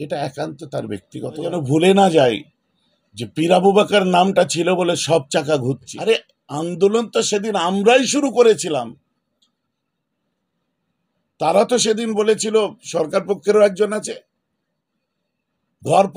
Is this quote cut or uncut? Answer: cut